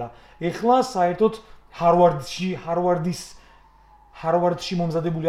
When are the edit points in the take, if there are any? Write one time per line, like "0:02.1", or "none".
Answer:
none